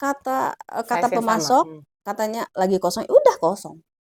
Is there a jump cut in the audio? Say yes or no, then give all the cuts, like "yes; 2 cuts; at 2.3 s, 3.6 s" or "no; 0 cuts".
no; 0 cuts